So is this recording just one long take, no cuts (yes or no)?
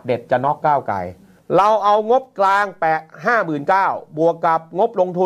no